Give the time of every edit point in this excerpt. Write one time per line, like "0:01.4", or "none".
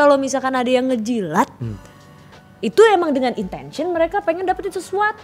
none